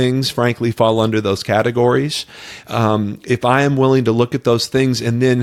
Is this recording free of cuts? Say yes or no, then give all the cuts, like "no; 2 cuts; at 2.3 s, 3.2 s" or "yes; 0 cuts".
yes; 0 cuts